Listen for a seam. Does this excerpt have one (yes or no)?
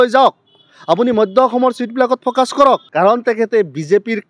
yes